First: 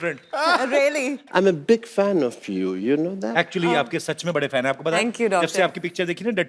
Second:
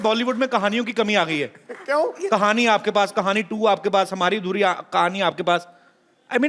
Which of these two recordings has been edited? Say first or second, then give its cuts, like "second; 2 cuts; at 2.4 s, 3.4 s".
first; 1 cut; at 1.2 s